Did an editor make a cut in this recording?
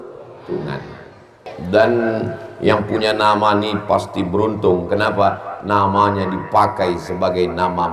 yes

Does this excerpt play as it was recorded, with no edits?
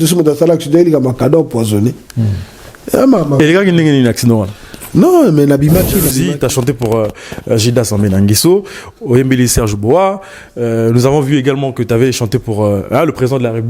no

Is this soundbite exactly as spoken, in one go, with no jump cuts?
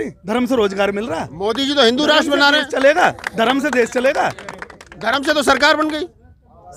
yes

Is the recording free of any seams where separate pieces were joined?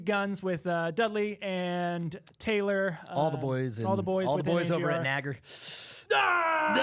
yes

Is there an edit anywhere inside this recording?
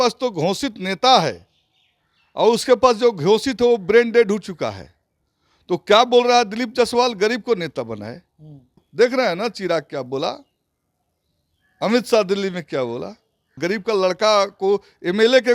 yes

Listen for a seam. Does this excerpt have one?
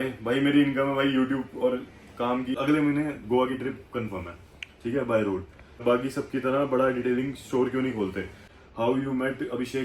yes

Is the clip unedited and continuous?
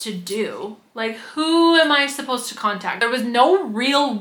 no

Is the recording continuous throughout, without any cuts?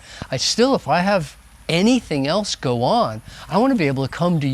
yes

